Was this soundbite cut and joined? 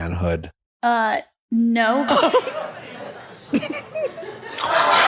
yes; 1 cut; at 1.8 s

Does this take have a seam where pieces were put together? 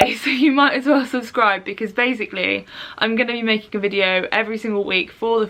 no; 0 cuts

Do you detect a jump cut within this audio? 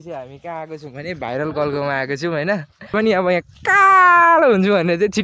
yes; 1 cut; at 2.9 s

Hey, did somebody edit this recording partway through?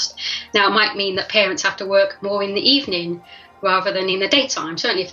no; 0 cuts

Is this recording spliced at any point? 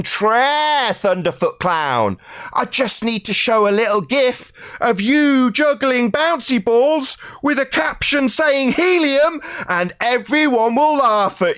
no; 0 cuts

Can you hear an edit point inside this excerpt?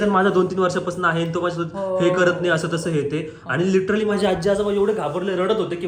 no; 0 cuts

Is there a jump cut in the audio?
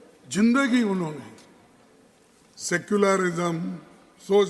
no; 0 cuts

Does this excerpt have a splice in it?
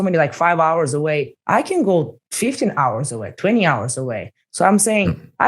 yes; 2 cuts; at 1.4 s, 2.2 s

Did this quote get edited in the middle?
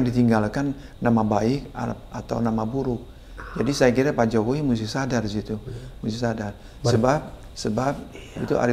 no; 0 cuts

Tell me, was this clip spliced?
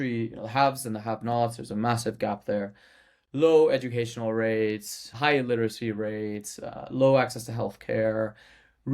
yes; 1 cut; at 5.1 s

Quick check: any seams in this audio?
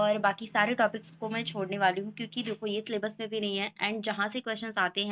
no; 0 cuts

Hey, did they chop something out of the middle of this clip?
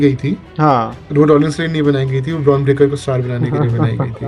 no; 0 cuts

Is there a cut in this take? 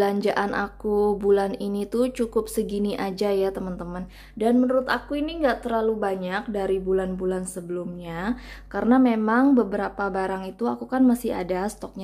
no; 0 cuts

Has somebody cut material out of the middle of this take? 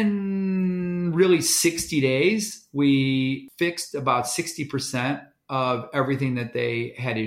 yes; 1 cut; at 3.5 s

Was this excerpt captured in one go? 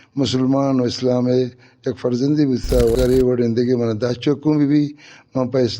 no; 1 cut; at 3.0 s

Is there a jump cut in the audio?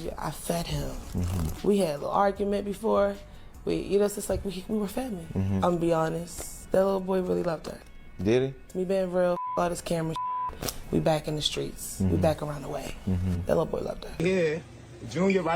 yes; 1 cut; at 14.2 s

